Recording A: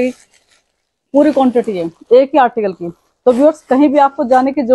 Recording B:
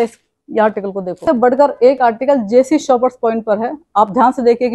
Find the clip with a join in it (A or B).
B